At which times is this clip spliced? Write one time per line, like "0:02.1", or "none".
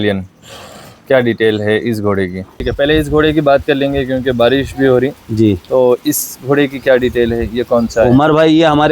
0:02.5